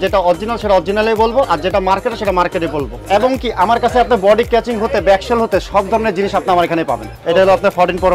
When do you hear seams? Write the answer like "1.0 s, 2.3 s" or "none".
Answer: 3.0 s, 7.1 s

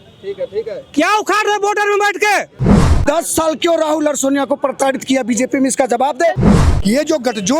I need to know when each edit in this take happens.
3.0 s, 6.5 s

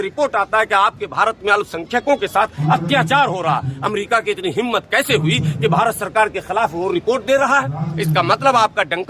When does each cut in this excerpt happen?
none

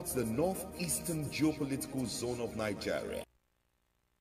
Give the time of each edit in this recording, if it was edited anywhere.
3.2 s

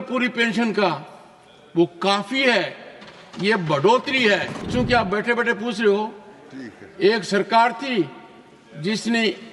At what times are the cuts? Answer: 4.7 s

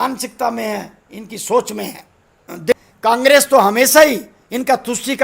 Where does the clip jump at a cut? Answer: 2.7 s

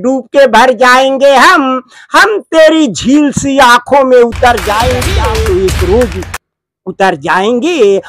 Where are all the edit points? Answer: 5.1 s

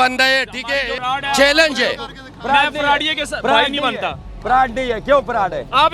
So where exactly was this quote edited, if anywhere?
0.9 s

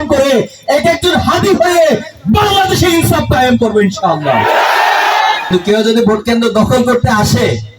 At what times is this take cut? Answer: 5.5 s

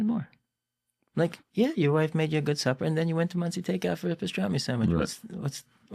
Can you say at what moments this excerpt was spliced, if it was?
1.4 s

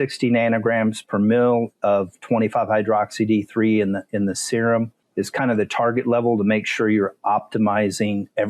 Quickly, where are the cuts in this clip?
5.0 s

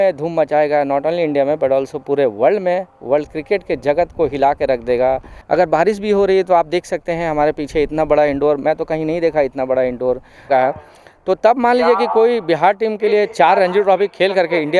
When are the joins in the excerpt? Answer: 5.3 s, 10.4 s

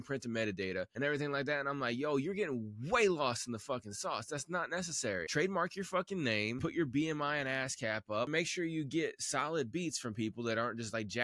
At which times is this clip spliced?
0.9 s, 5.3 s, 6.6 s, 8.3 s

